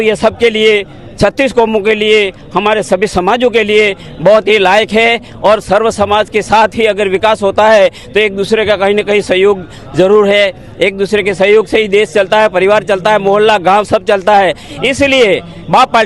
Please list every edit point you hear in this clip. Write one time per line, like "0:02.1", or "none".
none